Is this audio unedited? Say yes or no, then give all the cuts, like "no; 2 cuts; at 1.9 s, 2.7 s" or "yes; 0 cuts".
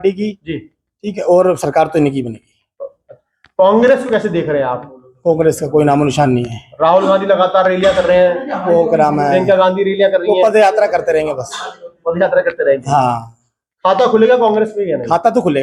yes; 0 cuts